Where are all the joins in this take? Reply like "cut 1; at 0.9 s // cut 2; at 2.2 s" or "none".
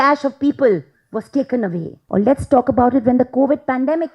cut 1; at 1.9 s

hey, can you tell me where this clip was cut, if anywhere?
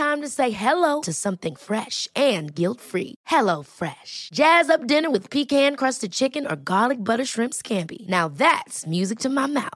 none

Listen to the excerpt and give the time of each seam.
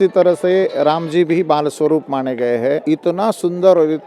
cut 1; at 2.8 s

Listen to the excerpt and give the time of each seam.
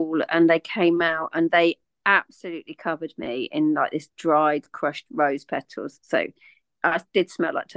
none

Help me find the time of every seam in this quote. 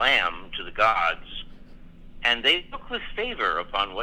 none

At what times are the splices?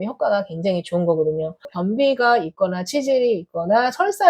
cut 1; at 1.7 s

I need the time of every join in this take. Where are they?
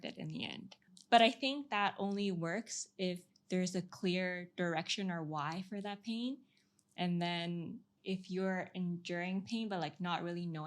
cut 1; at 0.9 s // cut 2; at 7.9 s

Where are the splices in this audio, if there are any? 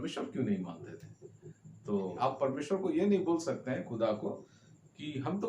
cut 1; at 2.2 s

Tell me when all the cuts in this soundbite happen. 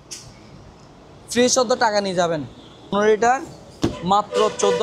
cut 1; at 2.9 s

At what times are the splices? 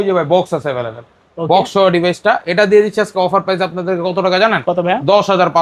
none

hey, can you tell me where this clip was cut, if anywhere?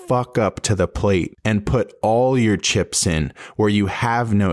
cut 1; at 1.3 s

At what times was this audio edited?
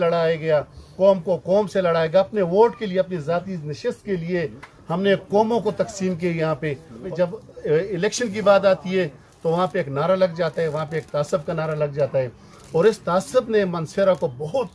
cut 1; at 7.1 s

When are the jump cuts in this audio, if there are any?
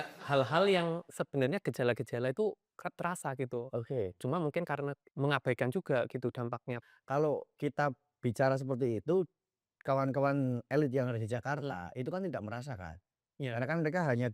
cut 1; at 5.0 s // cut 2; at 6.8 s

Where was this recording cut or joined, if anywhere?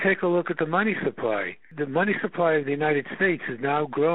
cut 1; at 1.7 s

